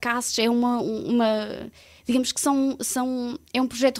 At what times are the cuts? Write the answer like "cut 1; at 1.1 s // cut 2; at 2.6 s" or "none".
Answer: none